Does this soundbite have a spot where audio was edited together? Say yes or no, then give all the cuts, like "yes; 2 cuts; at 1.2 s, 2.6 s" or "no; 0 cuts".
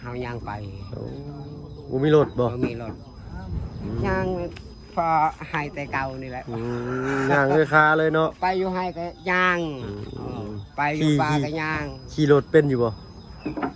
no; 0 cuts